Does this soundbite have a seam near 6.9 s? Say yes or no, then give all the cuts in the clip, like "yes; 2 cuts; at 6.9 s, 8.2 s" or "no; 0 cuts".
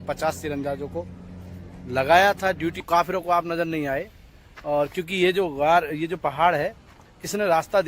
no; 1 cut; at 2.8 s